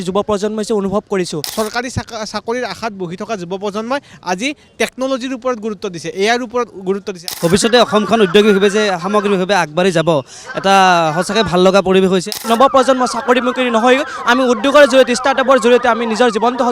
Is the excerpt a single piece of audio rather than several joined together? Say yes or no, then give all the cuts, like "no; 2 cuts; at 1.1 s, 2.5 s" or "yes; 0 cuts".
no; 3 cuts; at 1.4 s, 7.2 s, 12.4 s